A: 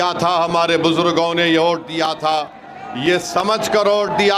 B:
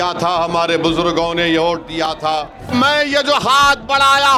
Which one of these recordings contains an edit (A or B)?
B